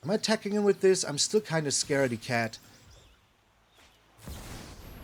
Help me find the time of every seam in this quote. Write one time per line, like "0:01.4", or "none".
0:03.5